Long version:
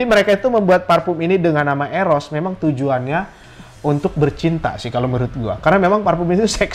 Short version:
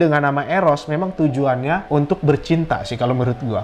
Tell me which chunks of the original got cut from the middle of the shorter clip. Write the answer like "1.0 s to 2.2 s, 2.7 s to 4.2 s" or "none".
3.3 s to 3.8 s